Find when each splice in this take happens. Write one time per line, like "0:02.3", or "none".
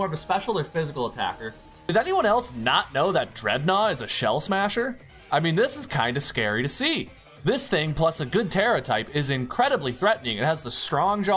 0:01.9